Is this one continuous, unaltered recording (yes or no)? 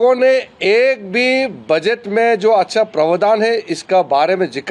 yes